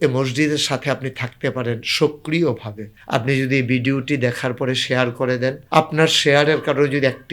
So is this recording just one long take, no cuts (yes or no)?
no